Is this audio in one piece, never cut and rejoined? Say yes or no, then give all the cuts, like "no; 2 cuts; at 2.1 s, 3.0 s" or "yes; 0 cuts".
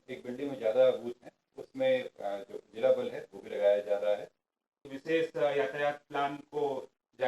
no; 1 cut; at 4.9 s